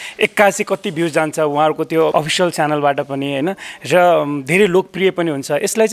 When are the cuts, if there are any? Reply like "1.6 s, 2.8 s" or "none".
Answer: 2.1 s